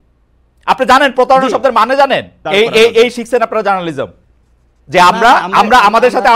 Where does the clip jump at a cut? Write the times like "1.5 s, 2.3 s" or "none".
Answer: 2.4 s